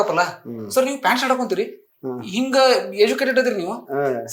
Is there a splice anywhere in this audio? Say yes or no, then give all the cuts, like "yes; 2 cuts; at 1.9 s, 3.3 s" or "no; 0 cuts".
no; 0 cuts